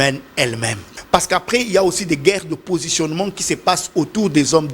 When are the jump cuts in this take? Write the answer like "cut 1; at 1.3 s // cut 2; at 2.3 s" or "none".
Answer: cut 1; at 0.9 s